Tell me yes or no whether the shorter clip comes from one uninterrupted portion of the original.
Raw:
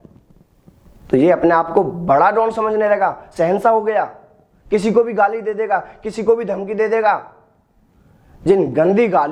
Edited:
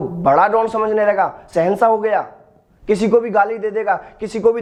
yes